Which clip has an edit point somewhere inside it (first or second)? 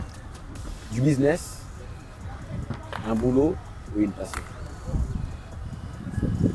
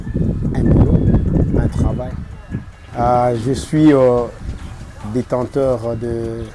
second